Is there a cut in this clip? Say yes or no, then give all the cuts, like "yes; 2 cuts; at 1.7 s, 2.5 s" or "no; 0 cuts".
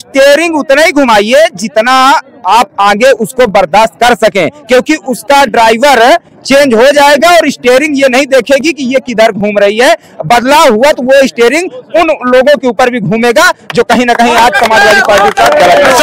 no; 0 cuts